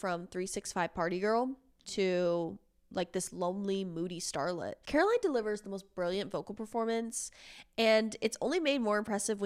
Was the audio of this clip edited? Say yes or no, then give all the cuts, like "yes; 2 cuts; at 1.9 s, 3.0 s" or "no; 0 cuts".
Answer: no; 0 cuts